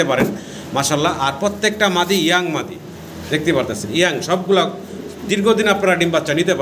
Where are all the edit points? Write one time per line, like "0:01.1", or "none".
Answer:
none